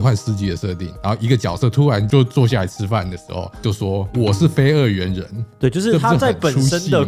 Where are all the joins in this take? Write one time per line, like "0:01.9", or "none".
0:03.6
0:05.4

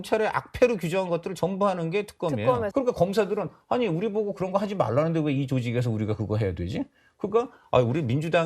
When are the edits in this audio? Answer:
0:02.7

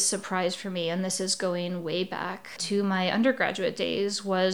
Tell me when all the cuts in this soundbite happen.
0:02.5

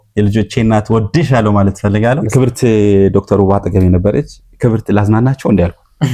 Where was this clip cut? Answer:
0:02.2

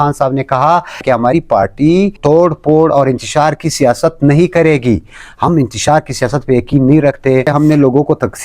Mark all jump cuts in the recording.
0:02.2
0:07.5

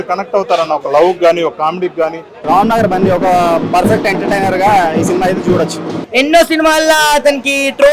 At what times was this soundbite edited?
0:02.4
0:06.0

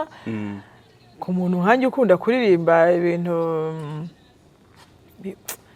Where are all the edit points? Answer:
none

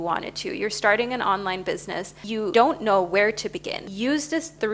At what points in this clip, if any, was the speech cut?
0:02.4
0:03.8

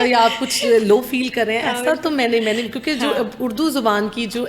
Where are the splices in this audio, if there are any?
none

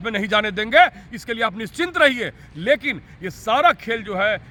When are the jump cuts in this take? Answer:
none

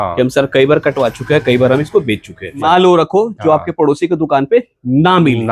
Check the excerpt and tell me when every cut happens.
0:02.5

